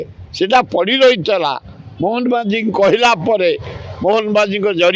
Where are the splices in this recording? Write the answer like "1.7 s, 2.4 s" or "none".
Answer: none